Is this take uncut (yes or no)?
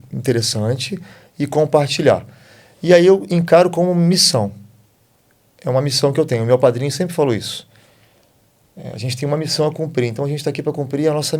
yes